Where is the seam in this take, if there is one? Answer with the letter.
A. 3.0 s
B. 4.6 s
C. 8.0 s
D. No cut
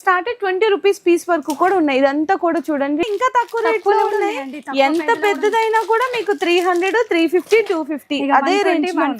A